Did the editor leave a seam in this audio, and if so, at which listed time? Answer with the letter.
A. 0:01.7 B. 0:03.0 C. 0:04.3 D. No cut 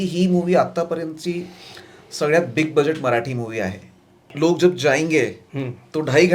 C